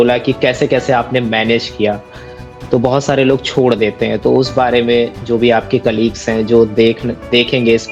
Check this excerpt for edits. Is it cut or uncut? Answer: uncut